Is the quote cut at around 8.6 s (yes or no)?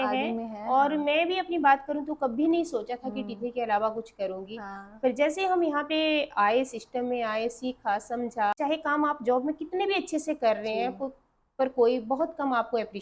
yes